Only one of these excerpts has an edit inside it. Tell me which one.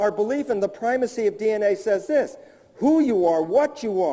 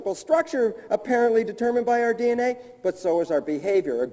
second; 1 cut; at 3.0 s

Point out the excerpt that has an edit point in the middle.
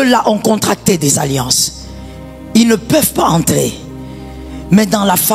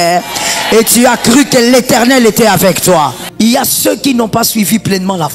second; 1 cut; at 3.2 s

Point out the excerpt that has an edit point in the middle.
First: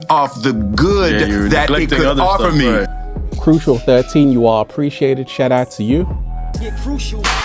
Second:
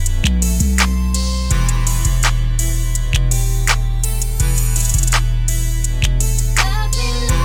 first; 1 cut; at 3.0 s

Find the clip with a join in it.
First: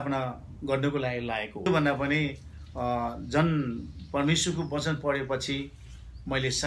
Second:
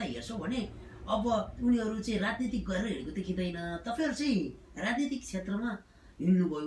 first; 1 cut; at 1.7 s

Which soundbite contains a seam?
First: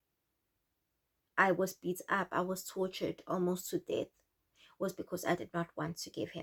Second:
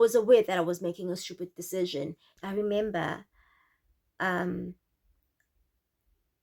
second; 1 cut; at 2.3 s

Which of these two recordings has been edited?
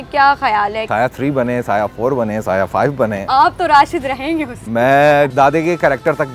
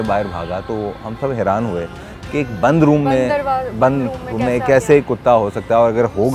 first; 2 cuts; at 0.8 s, 5.3 s

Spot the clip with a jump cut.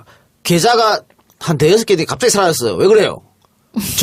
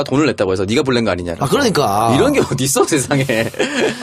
second; 1 cut; at 2.0 s

